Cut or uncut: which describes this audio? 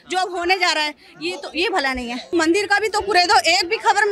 cut